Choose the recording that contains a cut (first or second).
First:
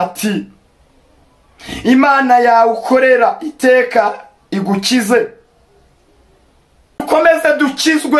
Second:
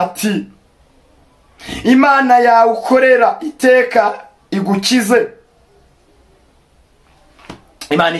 first